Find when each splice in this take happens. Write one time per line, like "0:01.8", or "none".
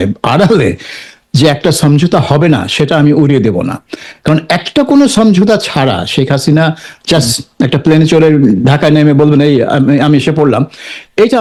none